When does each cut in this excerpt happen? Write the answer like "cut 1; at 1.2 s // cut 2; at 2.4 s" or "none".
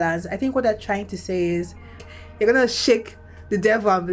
cut 1; at 2.1 s